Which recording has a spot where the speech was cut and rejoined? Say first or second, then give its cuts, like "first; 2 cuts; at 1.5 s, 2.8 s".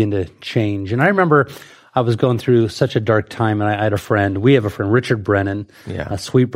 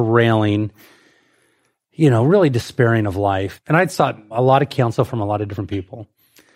second; 2 cuts; at 3.5 s, 4.2 s